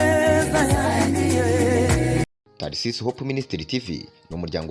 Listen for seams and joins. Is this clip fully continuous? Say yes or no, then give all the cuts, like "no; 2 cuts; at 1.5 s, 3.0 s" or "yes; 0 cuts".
no; 1 cut; at 2.2 s